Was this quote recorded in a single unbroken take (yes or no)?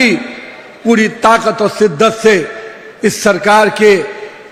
yes